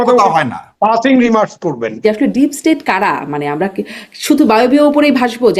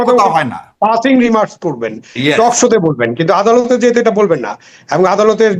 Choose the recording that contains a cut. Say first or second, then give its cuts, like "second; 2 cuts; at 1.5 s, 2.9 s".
first; 1 cut; at 2.0 s